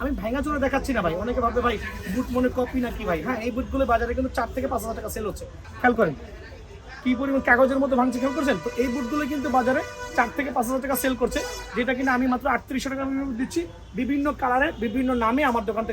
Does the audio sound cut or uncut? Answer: cut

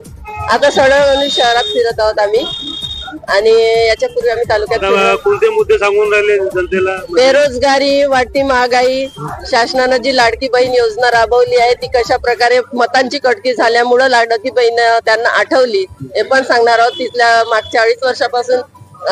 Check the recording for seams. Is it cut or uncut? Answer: uncut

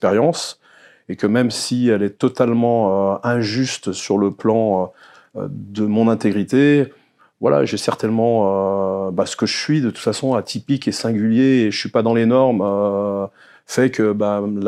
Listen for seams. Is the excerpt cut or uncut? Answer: uncut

